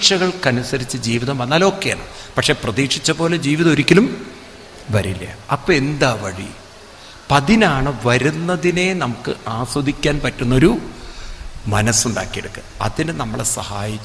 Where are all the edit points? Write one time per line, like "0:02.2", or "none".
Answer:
none